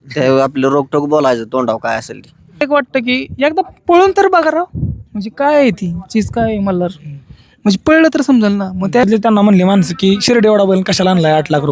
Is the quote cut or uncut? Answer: cut